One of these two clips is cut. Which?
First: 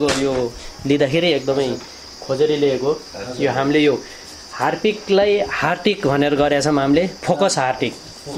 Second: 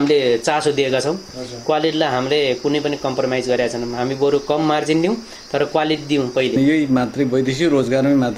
second; 1 cut; at 6.6 s

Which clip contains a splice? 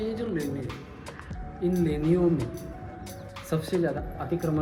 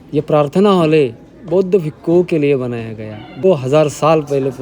second; 1 cut; at 3.4 s

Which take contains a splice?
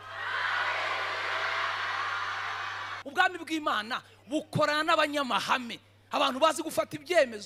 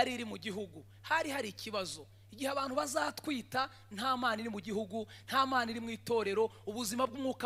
first; 1 cut; at 2.9 s

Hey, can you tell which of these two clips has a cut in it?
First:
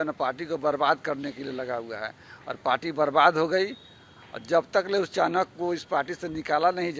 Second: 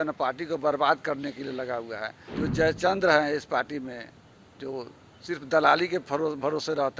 second; 1 cut; at 2.2 s

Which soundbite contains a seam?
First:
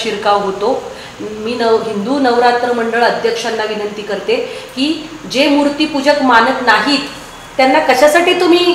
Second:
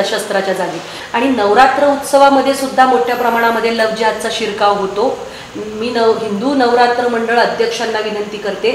second; 1 cut; at 0.9 s

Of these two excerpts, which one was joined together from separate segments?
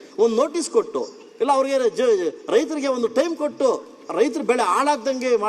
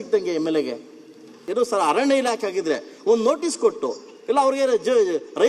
second; 1 cut; at 1.4 s

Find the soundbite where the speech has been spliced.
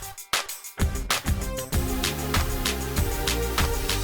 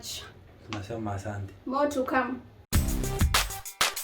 second; 1 cut; at 2.5 s

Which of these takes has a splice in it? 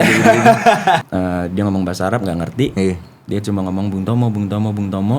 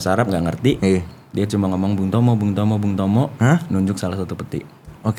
first; 1 cut; at 1.0 s

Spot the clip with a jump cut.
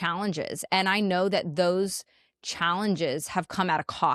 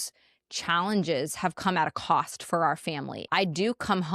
second; 1 cut; at 3.1 s

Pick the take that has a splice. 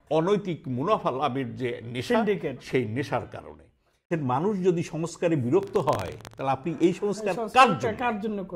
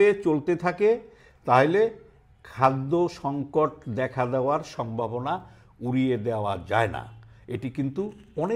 first; 1 cut; at 4.1 s

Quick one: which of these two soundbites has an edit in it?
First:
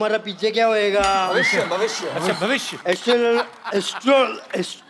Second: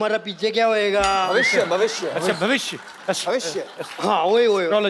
first; 1 cut; at 2.9 s

